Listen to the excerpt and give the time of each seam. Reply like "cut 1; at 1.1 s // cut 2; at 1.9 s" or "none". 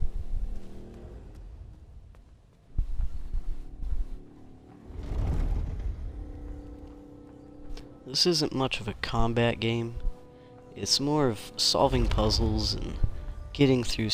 cut 1; at 9.7 s